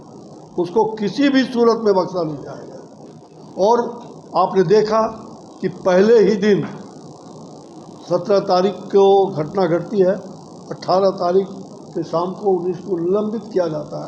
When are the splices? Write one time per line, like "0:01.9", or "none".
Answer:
none